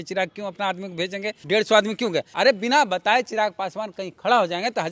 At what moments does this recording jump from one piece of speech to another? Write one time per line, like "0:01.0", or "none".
0:01.4
0:02.3